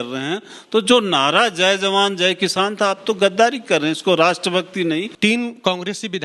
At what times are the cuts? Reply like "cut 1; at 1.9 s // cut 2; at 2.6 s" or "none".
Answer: cut 1; at 5.1 s